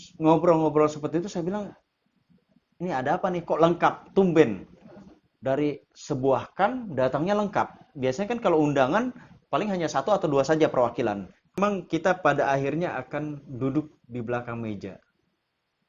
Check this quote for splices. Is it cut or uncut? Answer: cut